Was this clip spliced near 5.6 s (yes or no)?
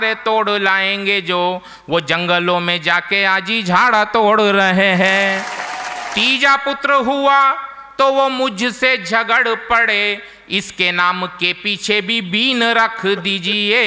yes